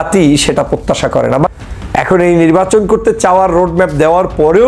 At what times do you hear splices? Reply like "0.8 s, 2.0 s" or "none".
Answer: 1.5 s